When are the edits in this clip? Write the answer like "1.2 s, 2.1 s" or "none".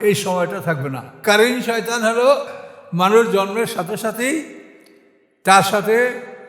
1.2 s, 2.5 s

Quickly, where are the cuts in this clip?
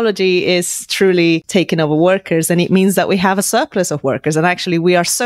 1.4 s

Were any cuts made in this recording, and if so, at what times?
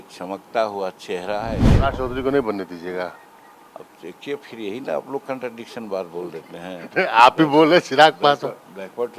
1.6 s

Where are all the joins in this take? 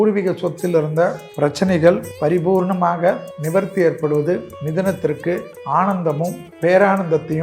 1.2 s, 2.1 s, 3.3 s, 4.6 s, 5.5 s, 6.4 s

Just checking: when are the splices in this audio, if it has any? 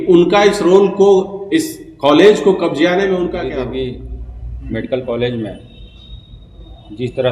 3.4 s

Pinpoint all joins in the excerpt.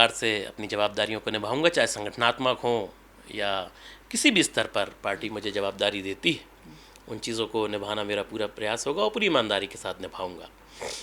none

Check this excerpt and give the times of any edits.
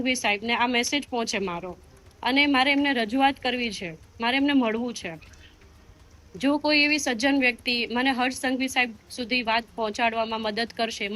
none

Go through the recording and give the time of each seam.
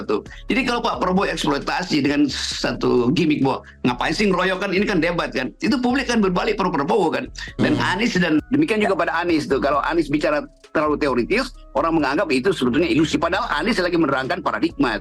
8.4 s

